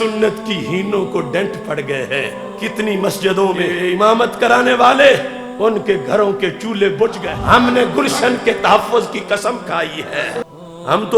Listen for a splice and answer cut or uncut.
cut